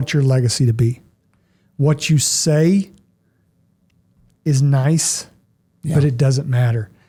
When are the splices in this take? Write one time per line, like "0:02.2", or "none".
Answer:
none